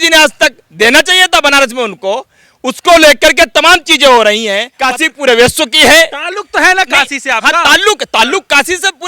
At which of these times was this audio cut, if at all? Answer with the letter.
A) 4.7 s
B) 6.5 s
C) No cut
A